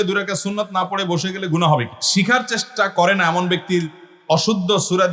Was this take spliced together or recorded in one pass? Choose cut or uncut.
cut